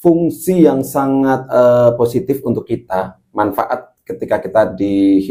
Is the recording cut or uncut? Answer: uncut